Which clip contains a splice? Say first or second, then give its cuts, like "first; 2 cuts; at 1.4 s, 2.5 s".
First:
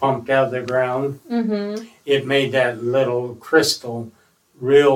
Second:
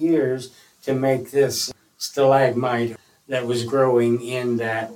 second; 2 cuts; at 1.6 s, 2.9 s